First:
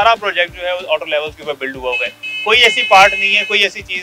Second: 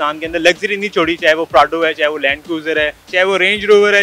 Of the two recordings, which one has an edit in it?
second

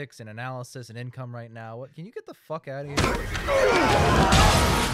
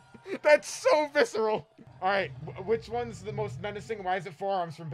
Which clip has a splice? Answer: second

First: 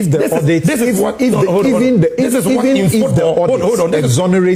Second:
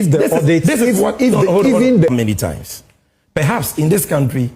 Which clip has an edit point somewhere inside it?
second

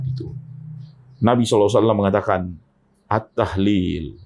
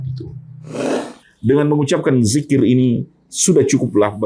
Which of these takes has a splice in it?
second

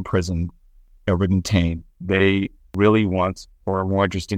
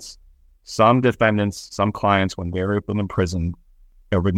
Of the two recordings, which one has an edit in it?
first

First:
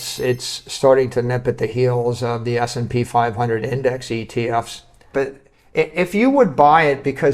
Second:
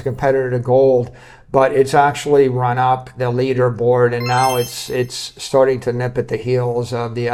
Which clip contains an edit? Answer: first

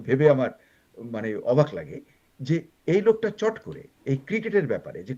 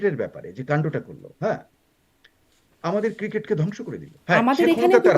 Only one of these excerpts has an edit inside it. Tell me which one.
second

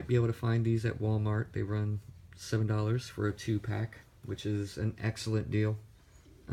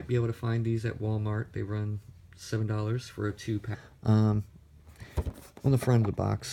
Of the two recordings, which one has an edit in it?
first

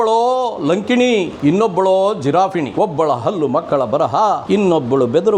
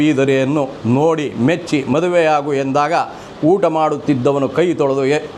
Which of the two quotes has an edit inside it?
first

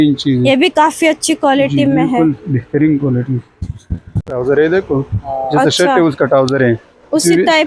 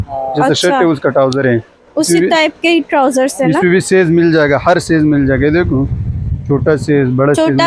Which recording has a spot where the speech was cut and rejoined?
first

